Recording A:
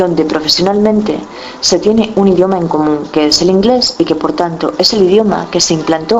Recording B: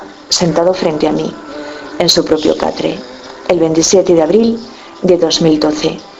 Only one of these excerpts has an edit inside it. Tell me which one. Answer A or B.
B